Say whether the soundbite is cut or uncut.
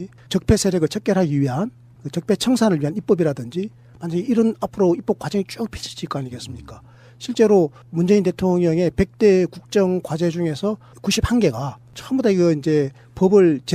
cut